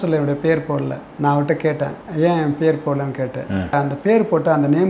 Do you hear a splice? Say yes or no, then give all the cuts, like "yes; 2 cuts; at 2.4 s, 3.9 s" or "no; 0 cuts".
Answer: yes; 3 cuts; at 1.0 s, 2.0 s, 3.7 s